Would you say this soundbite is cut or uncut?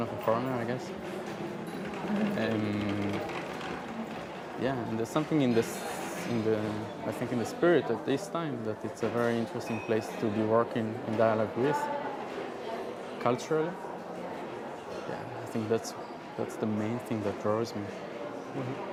uncut